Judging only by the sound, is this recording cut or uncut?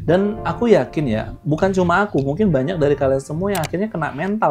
uncut